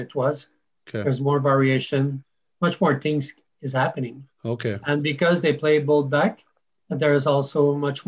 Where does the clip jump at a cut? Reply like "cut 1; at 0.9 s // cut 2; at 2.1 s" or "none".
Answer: none